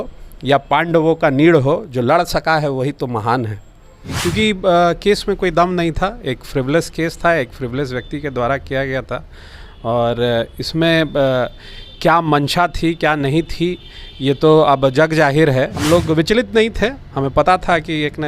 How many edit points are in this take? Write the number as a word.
two